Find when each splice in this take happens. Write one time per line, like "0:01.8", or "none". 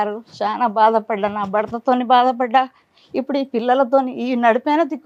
none